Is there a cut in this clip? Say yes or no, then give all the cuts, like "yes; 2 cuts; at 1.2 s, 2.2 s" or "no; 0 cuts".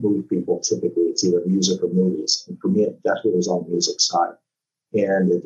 no; 0 cuts